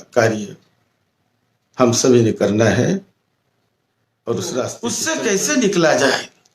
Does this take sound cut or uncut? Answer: cut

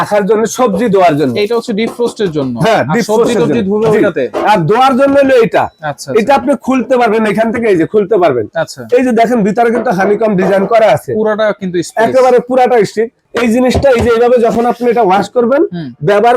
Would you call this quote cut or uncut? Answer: cut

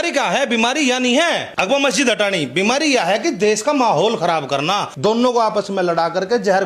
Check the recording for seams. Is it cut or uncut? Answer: cut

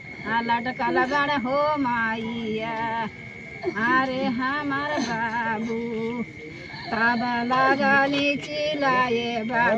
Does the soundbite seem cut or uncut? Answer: uncut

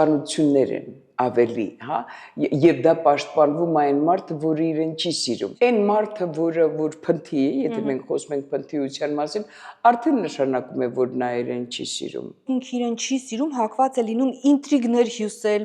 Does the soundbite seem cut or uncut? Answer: cut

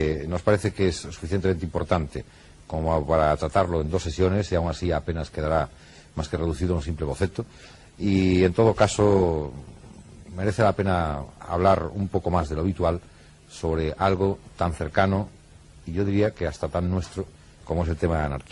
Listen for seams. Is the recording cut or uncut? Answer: uncut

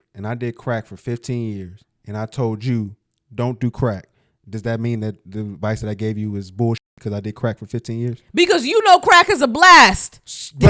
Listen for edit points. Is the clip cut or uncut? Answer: uncut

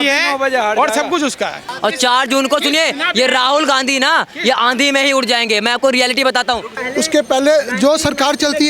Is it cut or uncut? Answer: cut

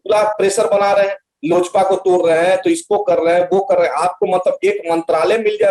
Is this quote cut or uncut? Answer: uncut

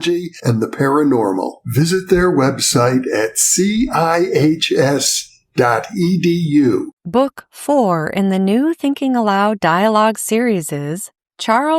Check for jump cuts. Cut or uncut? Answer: cut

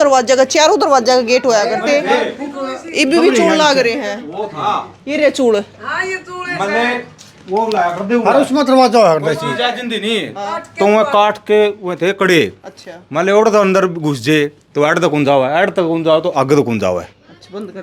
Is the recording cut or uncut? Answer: uncut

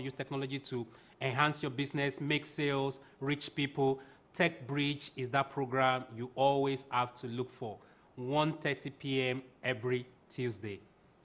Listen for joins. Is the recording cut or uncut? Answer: uncut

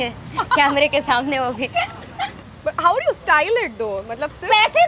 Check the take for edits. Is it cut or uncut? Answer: cut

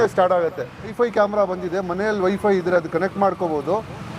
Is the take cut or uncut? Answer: cut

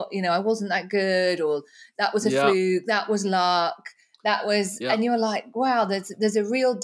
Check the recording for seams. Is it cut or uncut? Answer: uncut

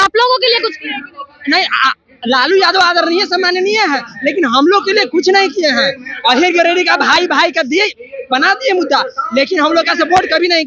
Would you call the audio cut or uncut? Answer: uncut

